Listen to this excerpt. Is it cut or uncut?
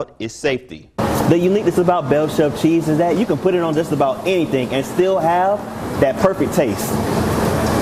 cut